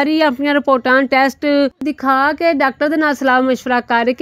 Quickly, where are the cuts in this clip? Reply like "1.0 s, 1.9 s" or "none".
1.8 s